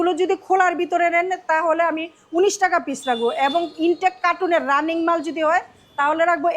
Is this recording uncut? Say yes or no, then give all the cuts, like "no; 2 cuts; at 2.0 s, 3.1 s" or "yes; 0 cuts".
yes; 0 cuts